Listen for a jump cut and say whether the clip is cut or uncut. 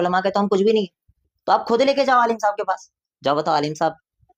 cut